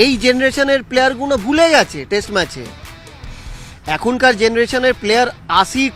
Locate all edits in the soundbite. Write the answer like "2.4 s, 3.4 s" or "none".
none